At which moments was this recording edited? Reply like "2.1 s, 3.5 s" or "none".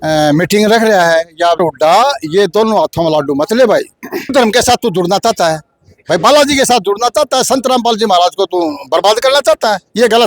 1.6 s, 4.3 s